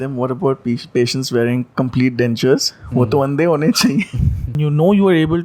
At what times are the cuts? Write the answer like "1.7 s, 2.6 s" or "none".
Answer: 4.6 s